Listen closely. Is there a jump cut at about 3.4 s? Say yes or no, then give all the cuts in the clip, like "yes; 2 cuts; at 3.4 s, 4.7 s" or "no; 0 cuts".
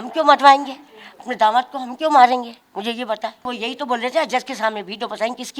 yes; 1 cut; at 3.4 s